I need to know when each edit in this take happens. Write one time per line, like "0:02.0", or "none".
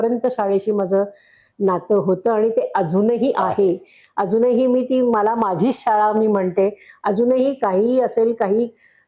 none